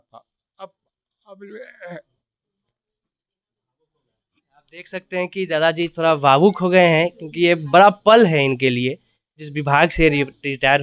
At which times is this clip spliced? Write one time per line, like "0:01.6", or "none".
0:09.5